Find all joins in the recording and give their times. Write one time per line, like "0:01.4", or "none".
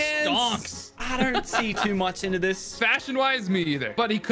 0:00.9
0:02.7